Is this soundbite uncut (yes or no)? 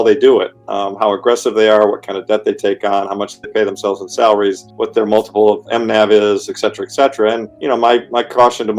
no